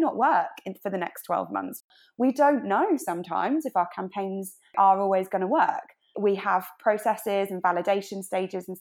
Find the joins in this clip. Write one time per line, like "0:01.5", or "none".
0:02.0
0:04.7
0:06.1